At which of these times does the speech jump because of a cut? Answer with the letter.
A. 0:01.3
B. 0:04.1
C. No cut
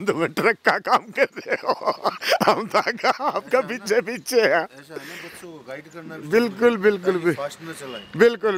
C